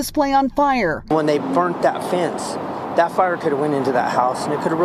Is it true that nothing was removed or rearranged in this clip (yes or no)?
yes